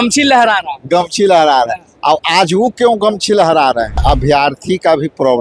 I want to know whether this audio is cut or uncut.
cut